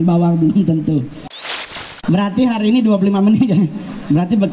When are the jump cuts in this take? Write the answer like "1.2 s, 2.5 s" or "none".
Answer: 1.3 s